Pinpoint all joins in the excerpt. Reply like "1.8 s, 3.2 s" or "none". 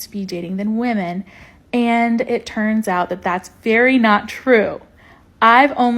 1.3 s